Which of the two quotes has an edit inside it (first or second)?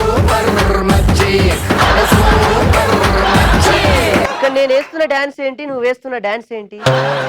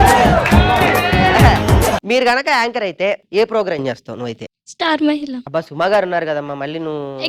second